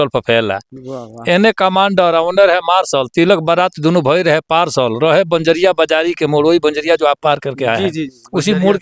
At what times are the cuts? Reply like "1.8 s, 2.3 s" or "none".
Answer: none